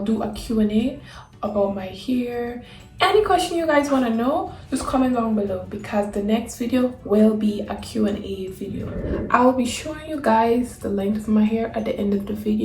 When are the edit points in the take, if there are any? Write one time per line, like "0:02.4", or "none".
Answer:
0:09.1